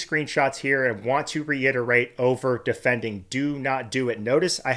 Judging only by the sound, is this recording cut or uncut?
uncut